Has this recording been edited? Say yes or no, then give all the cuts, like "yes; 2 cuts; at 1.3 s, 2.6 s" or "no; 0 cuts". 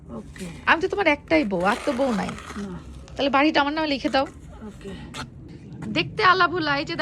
yes; 1 cut; at 5.5 s